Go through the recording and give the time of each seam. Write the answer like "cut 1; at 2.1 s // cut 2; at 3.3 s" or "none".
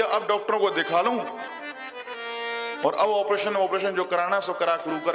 none